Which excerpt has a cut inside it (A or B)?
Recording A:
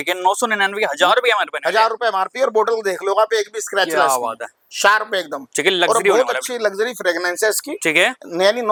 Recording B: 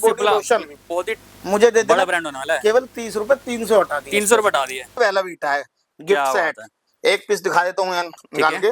B